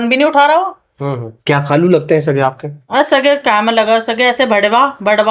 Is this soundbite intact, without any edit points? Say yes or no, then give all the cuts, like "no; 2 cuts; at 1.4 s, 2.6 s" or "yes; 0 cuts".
yes; 0 cuts